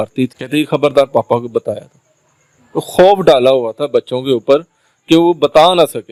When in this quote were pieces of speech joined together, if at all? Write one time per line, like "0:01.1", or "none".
none